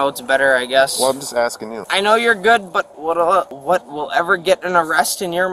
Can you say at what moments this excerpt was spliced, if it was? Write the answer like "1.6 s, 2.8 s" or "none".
1.9 s, 3.5 s